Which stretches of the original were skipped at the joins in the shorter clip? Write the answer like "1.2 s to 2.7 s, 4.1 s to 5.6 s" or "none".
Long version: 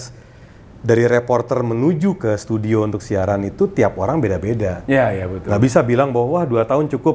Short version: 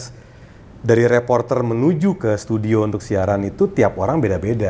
none